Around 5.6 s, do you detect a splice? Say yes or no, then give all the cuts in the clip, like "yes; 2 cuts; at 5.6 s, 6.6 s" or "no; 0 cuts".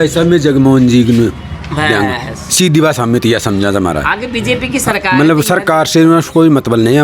no; 0 cuts